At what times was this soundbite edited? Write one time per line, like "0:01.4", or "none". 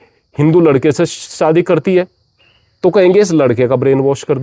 none